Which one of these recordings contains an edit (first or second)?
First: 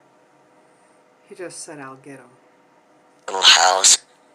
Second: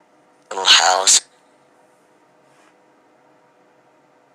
second